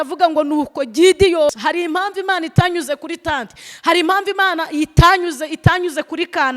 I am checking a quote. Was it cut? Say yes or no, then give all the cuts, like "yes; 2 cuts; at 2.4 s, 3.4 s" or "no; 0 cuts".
yes; 1 cut; at 1.5 s